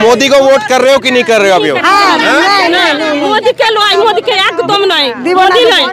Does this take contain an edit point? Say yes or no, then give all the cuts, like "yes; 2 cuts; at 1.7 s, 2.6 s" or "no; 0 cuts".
no; 0 cuts